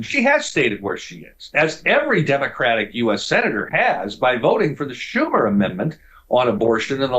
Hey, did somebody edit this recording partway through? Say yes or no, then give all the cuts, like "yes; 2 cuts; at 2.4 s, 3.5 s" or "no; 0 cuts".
no; 0 cuts